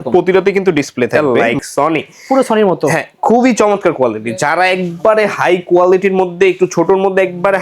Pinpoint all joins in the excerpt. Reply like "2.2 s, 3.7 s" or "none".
1.1 s